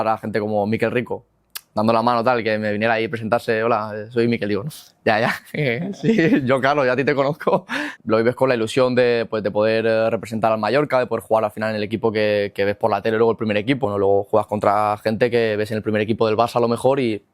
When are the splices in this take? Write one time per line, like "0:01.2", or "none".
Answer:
0:07.9
0:13.8